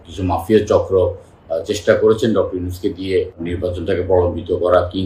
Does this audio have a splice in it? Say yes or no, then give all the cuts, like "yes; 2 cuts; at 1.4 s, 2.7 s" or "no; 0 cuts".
yes; 1 cut; at 3.5 s